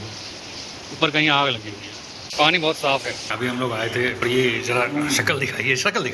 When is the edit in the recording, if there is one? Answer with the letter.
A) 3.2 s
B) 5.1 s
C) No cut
A